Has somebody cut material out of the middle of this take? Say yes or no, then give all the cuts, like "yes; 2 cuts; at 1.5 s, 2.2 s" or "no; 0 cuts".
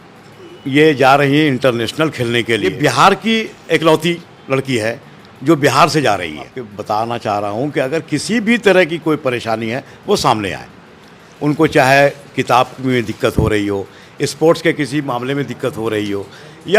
yes; 2 cuts; at 2.7 s, 6.7 s